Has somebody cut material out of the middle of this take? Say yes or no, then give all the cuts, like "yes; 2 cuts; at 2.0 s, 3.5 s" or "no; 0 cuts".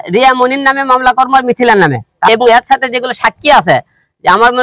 yes; 1 cut; at 2.3 s